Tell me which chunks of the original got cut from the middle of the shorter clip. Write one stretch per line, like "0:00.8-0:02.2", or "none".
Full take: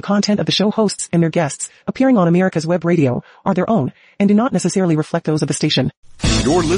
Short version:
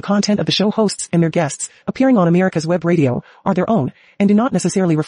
none